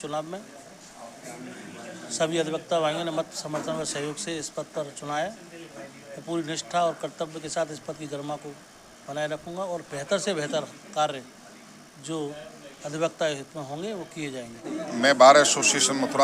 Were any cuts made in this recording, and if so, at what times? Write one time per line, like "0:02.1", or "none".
0:14.8